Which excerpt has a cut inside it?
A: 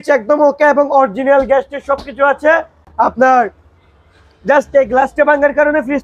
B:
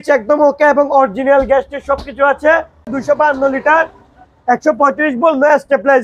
B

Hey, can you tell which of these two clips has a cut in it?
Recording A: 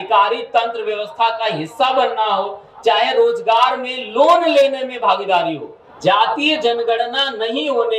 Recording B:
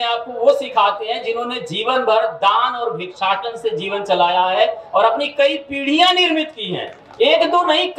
A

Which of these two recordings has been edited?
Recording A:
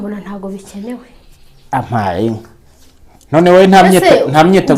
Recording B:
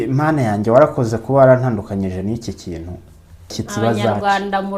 B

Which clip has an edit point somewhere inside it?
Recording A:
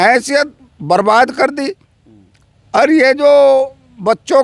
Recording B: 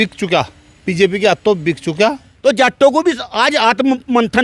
B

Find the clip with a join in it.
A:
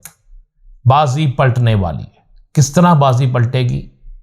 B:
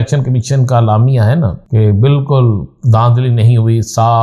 B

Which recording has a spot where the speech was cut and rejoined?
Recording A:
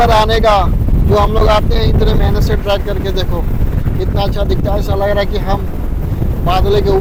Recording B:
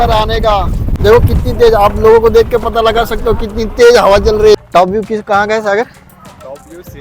B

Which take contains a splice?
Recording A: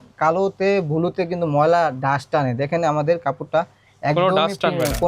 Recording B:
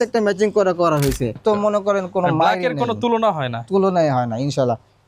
B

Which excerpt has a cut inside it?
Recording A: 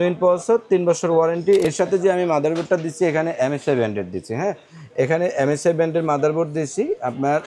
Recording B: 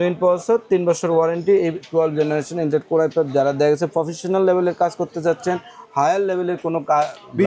A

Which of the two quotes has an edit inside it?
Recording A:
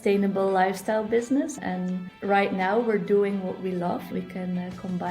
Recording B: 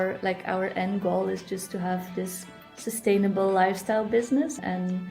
A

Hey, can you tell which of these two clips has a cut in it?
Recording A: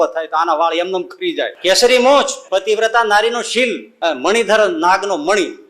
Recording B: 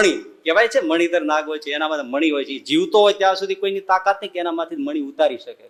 A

